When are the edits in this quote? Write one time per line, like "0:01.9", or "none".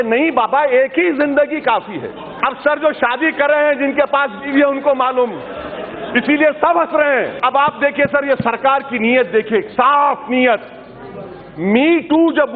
0:02.3
0:07.4